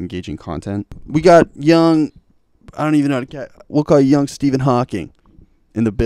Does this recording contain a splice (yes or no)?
yes